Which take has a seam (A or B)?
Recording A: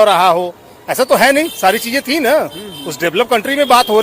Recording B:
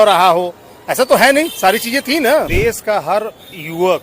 B